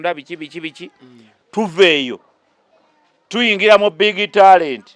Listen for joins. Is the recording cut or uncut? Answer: uncut